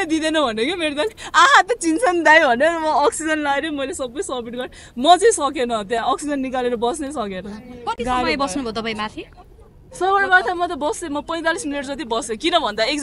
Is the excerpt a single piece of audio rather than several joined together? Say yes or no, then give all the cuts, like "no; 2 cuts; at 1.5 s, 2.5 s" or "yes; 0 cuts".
yes; 0 cuts